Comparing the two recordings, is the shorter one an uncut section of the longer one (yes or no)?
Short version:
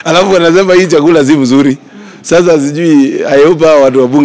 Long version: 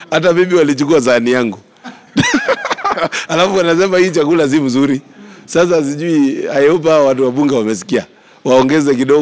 yes